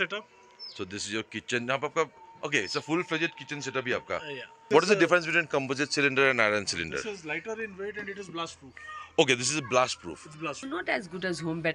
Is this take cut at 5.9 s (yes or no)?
no